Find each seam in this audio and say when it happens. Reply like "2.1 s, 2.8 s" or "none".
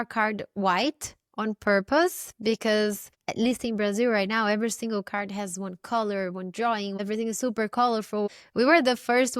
7.0 s, 8.3 s

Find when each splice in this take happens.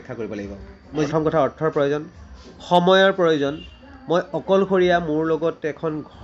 1.1 s

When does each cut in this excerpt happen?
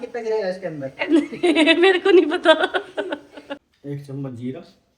3.7 s

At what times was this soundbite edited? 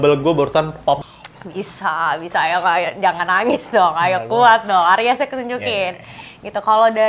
1.0 s

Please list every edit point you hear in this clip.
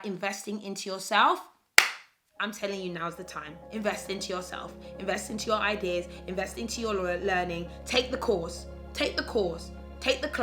none

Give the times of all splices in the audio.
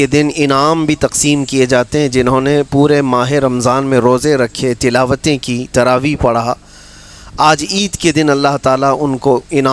none

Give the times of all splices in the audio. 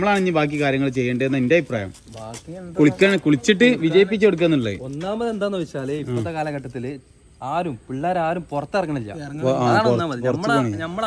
none

